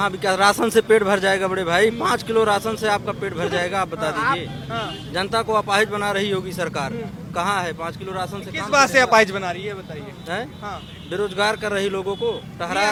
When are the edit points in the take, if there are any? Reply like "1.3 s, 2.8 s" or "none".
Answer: none